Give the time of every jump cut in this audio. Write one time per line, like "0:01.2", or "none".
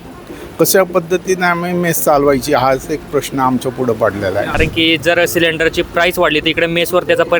0:04.6